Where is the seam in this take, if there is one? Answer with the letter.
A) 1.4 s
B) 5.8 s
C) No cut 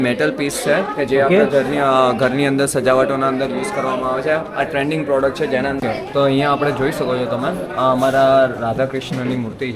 B